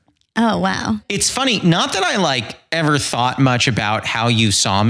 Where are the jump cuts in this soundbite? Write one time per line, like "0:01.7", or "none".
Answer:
0:01.2